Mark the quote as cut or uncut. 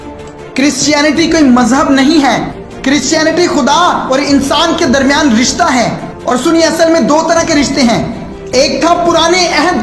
uncut